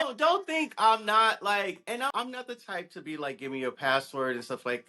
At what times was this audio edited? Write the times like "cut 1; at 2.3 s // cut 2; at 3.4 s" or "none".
cut 1; at 2.1 s

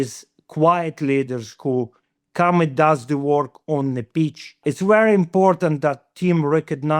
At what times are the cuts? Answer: cut 1; at 4.6 s

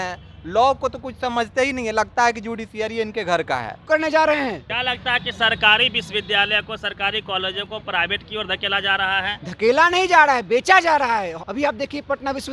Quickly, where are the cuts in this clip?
cut 1; at 3.8 s // cut 2; at 4.7 s // cut 3; at 11.4 s

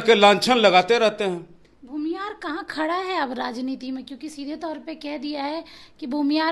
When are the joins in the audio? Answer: none

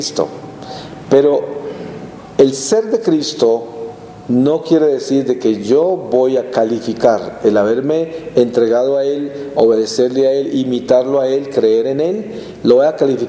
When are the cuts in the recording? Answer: cut 1; at 5.2 s

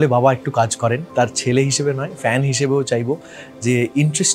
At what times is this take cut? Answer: cut 1; at 1.1 s

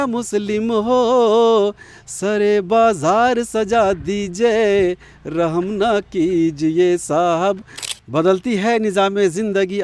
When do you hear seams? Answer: cut 1; at 7.7 s

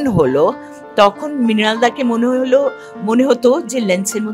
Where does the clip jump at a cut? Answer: none

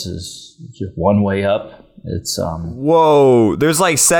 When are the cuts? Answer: cut 1; at 2.9 s

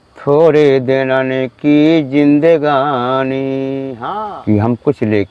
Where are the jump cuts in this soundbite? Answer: cut 1; at 3.9 s

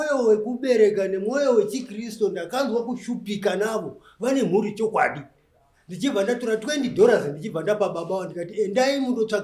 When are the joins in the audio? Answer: none

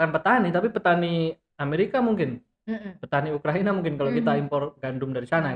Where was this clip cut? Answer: none

